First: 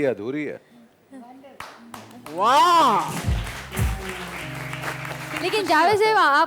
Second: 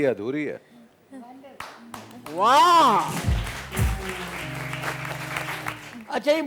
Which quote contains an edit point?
first; 1 cut; at 5.3 s

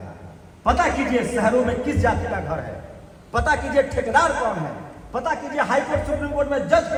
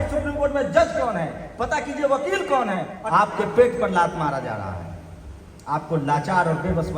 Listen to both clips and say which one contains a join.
second; 1 cut; at 2.9 s

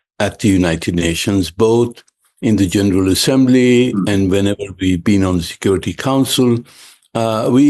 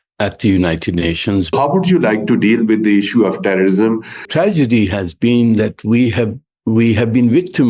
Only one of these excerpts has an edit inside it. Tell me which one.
second; 2 cuts; at 1.5 s, 4.3 s

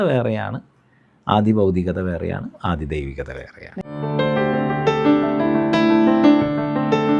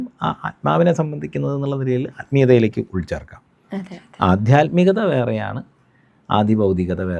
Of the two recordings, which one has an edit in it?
first; 1 cut; at 3.8 s

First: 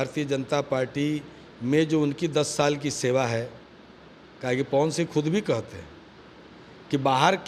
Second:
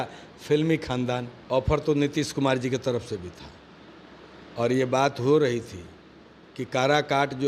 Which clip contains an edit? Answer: second; 1 cut; at 1.3 s

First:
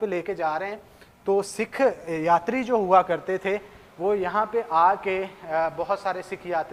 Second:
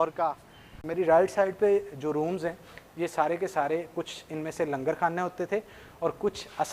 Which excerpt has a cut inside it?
second; 1 cut; at 1.0 s

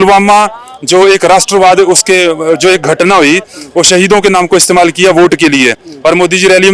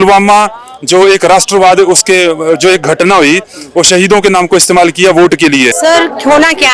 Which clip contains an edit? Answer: second; 1 cut; at 5.7 s

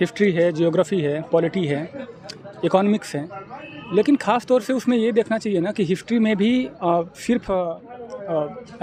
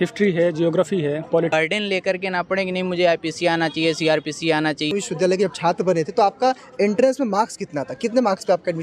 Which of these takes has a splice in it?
second; 2 cuts; at 1.5 s, 4.9 s

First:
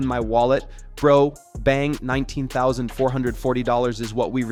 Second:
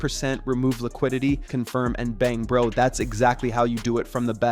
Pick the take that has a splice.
second; 1 cut; at 1.5 s

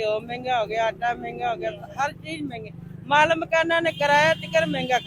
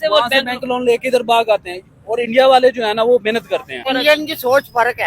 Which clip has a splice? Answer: second; 1 cut; at 3.7 s

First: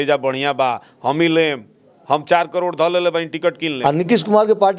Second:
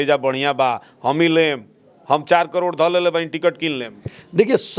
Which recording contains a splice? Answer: first; 1 cut; at 3.8 s

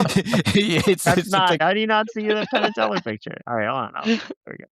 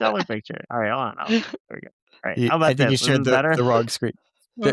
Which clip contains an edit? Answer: first; 1 cut; at 1.6 s

